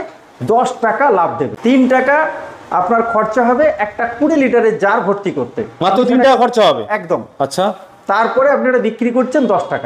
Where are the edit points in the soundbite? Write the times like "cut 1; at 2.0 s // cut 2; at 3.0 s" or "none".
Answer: none